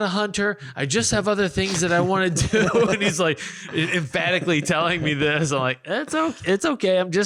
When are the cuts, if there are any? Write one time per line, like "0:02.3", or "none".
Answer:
none